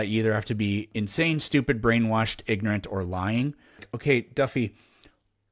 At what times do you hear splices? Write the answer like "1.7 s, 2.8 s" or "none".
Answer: 0.9 s, 3.9 s